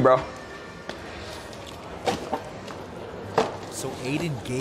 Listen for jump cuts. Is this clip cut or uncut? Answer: uncut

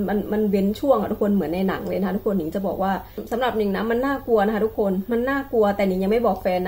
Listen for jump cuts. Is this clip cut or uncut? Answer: cut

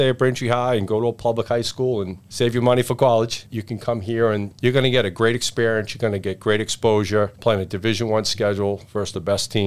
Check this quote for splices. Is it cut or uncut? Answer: cut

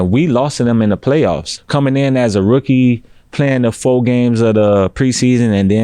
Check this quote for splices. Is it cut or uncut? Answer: cut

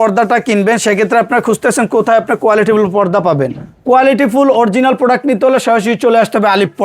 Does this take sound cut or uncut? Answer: uncut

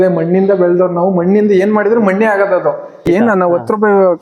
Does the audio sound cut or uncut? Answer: cut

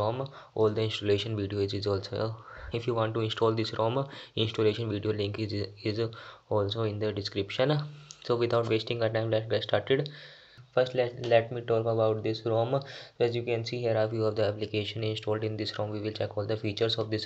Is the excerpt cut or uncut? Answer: cut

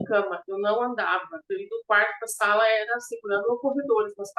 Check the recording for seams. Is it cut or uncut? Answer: uncut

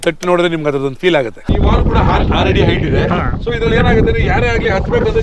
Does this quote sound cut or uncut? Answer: cut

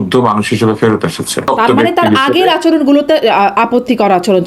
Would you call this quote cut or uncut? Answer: cut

